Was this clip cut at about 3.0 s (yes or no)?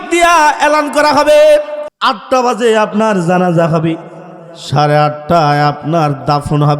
no